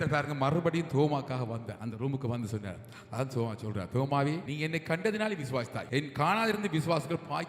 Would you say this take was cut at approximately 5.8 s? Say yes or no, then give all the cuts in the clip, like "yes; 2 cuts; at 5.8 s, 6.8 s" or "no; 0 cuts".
yes; 3 cuts; at 1.7 s, 4.5 s, 5.8 s